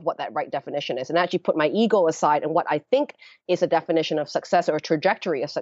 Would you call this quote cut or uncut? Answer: uncut